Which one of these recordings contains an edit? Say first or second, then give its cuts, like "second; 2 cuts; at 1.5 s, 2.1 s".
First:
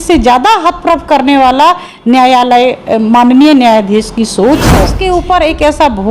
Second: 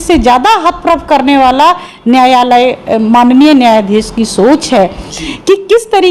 first; 1 cut; at 4.9 s